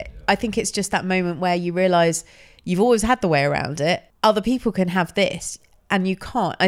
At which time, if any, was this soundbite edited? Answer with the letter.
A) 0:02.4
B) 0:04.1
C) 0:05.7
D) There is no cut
B